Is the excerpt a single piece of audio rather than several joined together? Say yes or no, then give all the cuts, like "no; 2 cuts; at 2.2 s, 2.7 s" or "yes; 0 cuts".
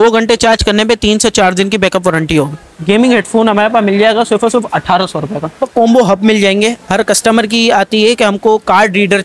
no; 2 cuts; at 2.7 s, 5.6 s